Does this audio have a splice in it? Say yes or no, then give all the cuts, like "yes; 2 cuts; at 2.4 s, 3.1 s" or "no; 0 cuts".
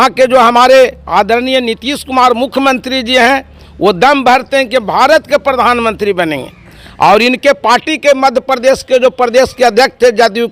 no; 0 cuts